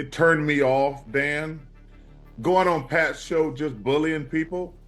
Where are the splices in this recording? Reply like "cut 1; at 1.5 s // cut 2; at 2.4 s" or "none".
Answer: cut 1; at 1.6 s